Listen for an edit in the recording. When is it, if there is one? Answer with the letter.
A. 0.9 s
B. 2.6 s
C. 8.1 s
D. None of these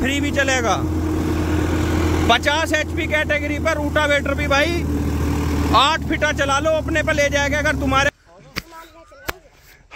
C